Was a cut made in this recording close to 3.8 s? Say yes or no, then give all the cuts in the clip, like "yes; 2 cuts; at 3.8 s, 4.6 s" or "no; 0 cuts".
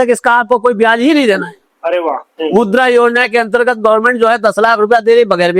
no; 1 cut; at 2.3 s